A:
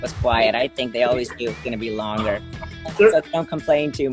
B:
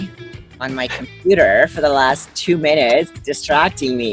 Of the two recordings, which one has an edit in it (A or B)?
A